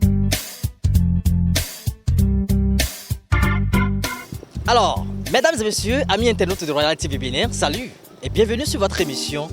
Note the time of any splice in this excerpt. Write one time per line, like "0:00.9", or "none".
0:01.5